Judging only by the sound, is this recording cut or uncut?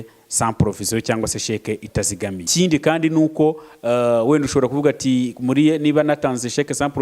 cut